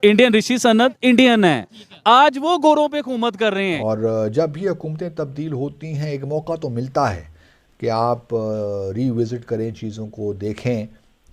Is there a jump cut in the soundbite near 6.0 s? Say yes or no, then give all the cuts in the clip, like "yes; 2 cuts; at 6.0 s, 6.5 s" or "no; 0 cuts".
no; 1 cut; at 3.8 s